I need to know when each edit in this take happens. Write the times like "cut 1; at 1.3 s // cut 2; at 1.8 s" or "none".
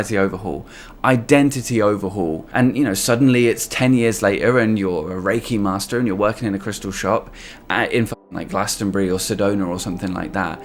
cut 1; at 2.4 s